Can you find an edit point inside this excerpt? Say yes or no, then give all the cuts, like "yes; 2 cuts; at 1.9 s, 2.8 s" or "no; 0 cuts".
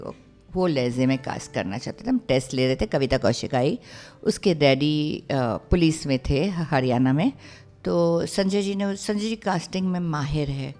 no; 0 cuts